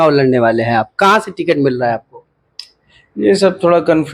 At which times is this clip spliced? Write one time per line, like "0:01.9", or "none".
none